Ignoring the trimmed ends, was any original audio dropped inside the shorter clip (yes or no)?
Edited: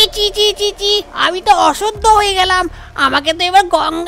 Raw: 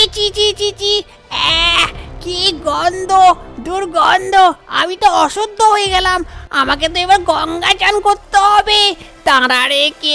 yes